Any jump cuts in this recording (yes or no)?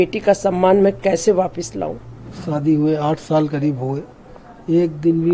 yes